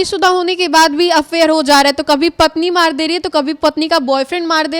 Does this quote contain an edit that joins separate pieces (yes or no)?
no